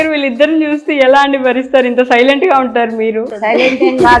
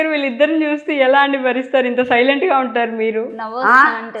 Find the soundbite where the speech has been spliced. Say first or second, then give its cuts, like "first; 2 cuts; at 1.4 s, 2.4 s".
first; 1 cut; at 3.3 s